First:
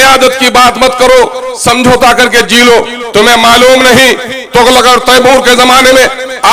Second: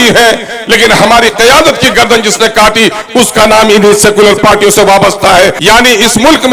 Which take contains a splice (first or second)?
second